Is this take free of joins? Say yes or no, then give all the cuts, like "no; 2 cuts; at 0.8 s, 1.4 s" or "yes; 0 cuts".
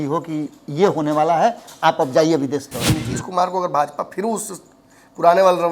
no; 1 cut; at 2.8 s